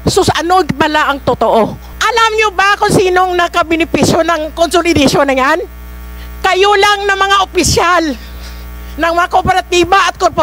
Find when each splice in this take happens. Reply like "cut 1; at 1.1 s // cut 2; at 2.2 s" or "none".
cut 1; at 1.9 s